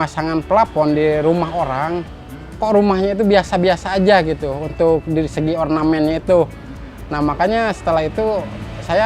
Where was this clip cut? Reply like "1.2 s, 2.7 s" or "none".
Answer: none